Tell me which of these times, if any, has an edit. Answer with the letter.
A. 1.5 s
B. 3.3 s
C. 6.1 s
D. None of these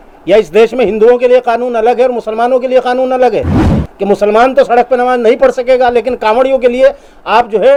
D